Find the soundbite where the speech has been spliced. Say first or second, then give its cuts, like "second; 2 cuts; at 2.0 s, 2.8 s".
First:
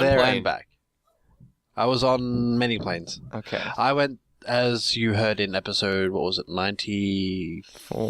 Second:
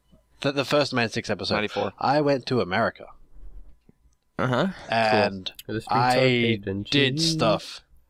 first; 1 cut; at 2.2 s